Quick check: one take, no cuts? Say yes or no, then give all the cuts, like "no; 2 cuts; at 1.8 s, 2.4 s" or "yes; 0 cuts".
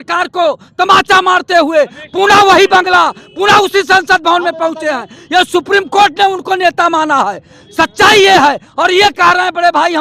yes; 0 cuts